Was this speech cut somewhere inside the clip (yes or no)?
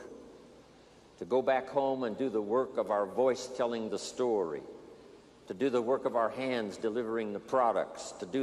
yes